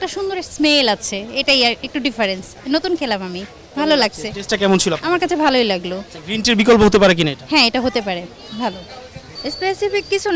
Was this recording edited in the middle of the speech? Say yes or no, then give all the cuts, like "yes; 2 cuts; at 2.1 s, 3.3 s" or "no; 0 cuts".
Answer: no; 0 cuts